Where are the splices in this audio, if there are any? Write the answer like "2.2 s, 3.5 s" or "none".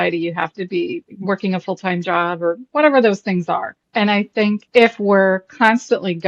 1.1 s, 3.8 s, 4.7 s

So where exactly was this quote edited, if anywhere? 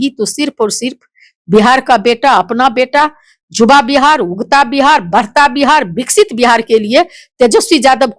none

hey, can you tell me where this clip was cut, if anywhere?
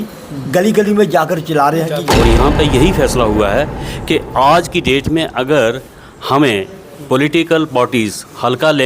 2.1 s

